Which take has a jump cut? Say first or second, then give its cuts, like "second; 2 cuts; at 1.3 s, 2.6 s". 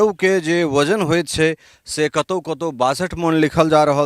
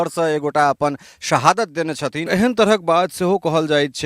second; 1 cut; at 2.3 s